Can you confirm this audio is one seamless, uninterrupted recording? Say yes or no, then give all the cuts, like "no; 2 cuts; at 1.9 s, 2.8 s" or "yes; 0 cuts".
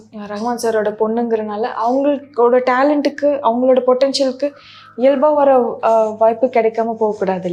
yes; 0 cuts